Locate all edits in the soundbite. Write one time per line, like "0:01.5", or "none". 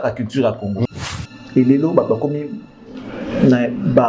0:00.9